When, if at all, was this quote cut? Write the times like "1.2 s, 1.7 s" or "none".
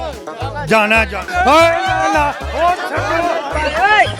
1.2 s